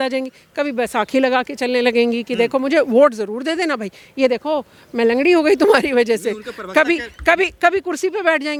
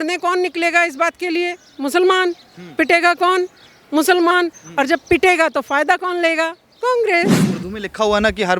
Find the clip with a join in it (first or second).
second